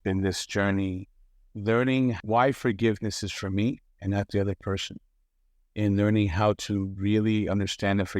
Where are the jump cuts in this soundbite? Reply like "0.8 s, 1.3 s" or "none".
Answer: 2.2 s